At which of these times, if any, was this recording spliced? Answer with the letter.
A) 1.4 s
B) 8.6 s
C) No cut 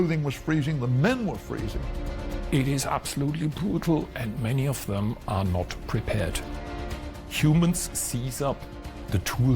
A